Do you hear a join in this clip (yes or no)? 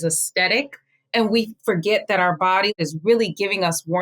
yes